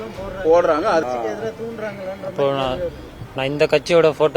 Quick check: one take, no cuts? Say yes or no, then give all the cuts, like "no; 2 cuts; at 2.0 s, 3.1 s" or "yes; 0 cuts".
no; 1 cut; at 1.0 s